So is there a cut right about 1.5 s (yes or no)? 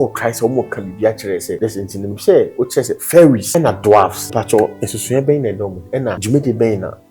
yes